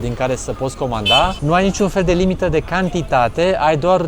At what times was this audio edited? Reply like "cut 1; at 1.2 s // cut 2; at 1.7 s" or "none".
cut 1; at 1.4 s